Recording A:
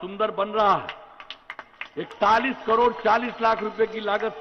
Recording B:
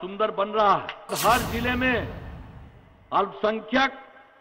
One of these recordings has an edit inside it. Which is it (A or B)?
B